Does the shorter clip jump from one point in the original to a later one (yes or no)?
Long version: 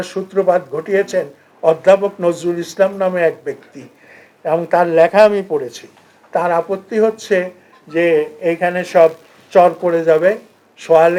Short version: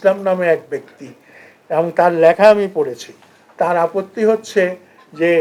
no